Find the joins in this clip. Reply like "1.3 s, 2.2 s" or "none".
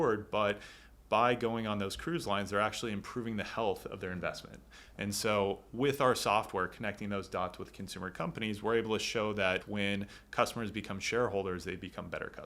9.6 s